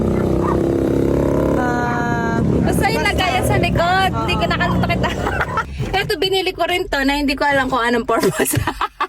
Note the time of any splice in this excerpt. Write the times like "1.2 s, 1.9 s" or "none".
5.7 s

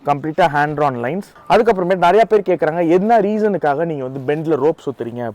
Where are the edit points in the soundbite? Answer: 1.3 s

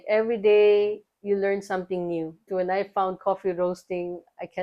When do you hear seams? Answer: 2.5 s

